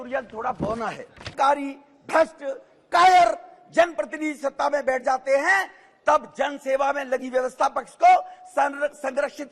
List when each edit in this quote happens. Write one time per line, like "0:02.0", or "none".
0:01.3